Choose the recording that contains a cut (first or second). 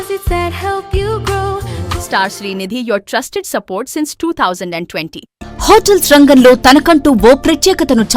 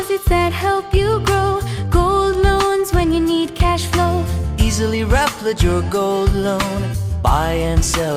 first